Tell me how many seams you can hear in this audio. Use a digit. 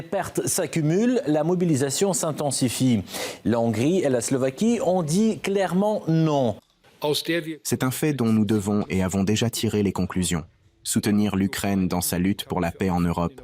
1